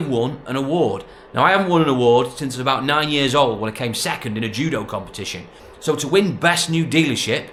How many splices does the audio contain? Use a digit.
0